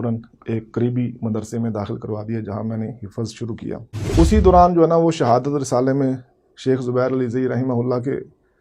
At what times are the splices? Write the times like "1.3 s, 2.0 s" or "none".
4.1 s